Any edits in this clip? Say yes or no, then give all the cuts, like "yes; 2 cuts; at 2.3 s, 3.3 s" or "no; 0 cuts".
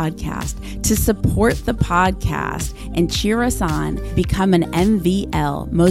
no; 0 cuts